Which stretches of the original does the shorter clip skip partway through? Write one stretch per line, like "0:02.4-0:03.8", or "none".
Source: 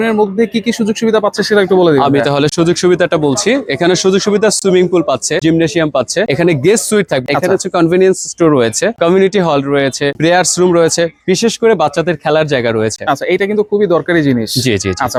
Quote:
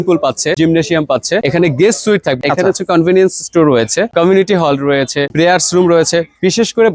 none